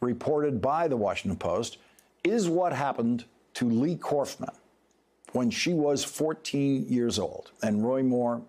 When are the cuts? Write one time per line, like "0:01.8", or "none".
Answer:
none